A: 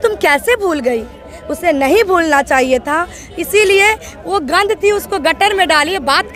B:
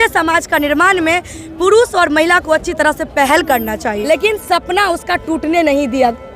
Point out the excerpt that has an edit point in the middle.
B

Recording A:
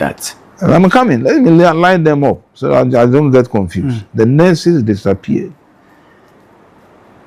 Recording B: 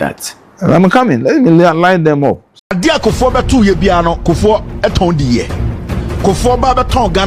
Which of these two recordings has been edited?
B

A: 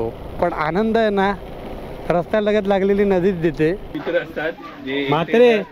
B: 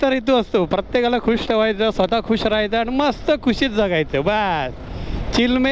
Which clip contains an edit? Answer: A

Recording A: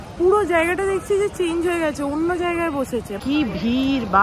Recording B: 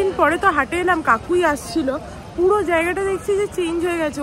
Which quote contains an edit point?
A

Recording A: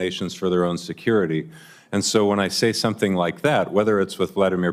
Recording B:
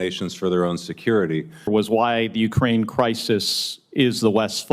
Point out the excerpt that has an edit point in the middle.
B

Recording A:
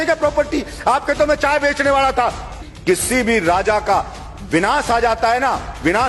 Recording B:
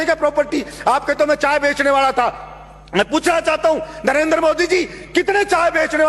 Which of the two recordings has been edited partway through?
A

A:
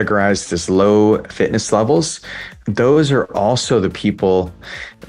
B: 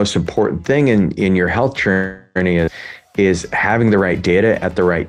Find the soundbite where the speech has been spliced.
A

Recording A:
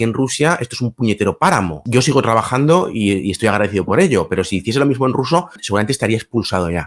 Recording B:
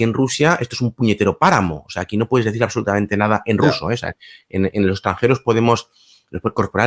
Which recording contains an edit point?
A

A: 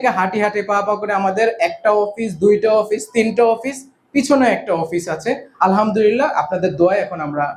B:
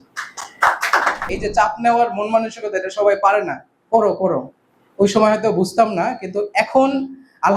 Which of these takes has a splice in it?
B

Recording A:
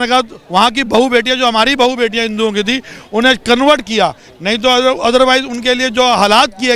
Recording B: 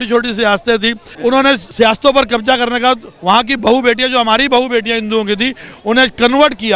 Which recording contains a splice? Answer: B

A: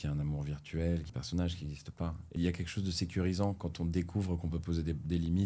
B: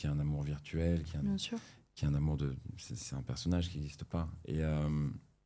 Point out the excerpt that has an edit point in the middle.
A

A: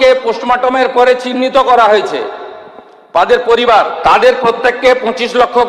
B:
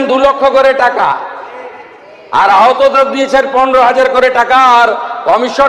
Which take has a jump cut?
A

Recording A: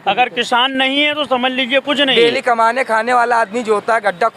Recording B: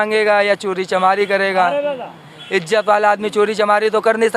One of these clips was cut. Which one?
A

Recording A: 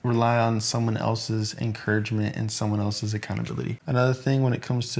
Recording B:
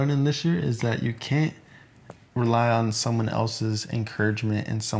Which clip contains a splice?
A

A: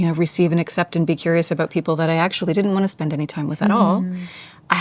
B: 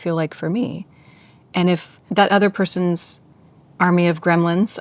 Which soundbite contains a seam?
B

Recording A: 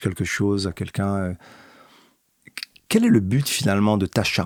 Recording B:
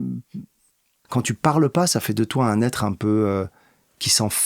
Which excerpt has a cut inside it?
B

